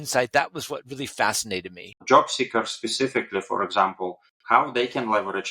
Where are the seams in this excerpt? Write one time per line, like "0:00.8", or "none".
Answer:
0:02.0